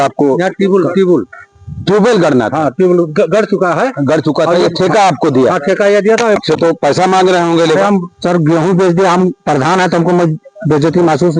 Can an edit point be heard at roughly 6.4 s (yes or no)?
yes